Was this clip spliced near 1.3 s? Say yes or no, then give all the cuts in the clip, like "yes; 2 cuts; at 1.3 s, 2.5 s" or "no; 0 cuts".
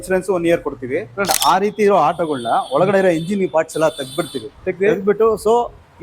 yes; 1 cut; at 1.3 s